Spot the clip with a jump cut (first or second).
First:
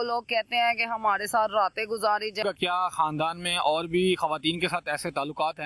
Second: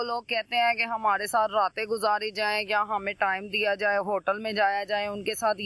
first